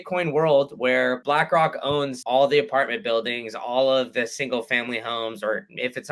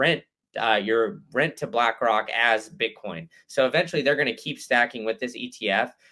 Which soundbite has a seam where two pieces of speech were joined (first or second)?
first